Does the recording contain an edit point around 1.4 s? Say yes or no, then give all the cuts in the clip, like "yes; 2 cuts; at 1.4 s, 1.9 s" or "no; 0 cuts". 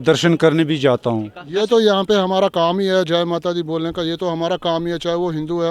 yes; 1 cut; at 1.4 s